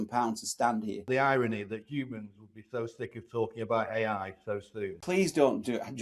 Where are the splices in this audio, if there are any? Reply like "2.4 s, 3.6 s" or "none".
1.0 s, 5.0 s